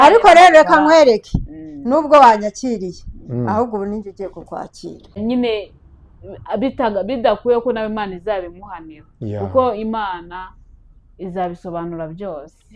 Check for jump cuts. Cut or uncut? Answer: cut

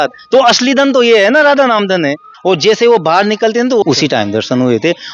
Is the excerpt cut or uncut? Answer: cut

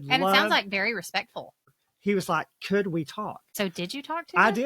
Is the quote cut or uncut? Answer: cut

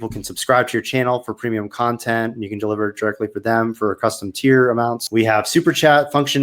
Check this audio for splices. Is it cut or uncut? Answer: cut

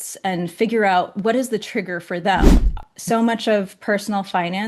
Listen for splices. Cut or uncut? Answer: cut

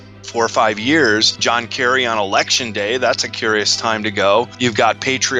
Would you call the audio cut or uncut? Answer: cut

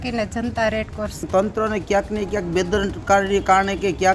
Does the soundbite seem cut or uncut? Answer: cut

